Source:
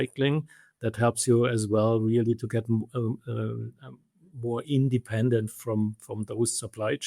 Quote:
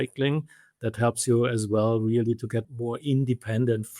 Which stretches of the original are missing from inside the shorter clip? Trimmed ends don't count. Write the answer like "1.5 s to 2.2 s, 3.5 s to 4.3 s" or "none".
2.6 s to 4.3 s